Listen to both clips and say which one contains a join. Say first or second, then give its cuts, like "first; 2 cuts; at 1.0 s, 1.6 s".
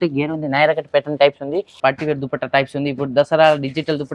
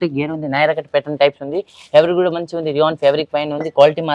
first; 1 cut; at 1.7 s